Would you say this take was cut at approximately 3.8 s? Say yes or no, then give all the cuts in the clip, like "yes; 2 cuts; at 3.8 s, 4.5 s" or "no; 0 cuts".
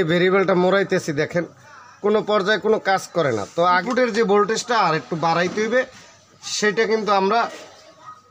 yes; 1 cut; at 3.8 s